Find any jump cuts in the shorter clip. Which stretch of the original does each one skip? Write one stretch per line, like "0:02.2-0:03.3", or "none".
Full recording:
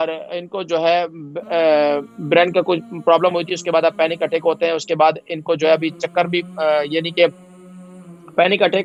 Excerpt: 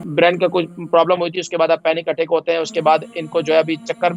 none